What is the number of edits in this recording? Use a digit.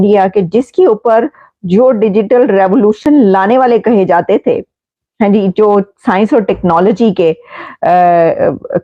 0